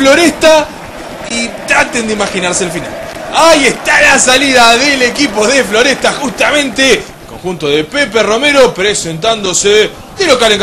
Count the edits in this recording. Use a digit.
1